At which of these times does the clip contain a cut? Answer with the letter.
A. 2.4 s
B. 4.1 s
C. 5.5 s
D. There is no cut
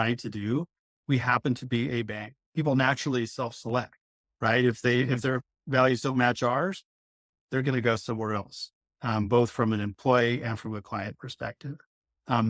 A